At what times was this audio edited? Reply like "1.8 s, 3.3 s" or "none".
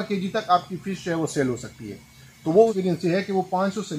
2.8 s